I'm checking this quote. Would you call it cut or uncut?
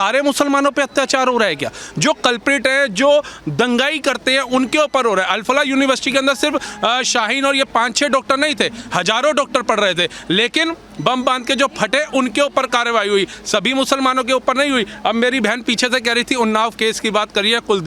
uncut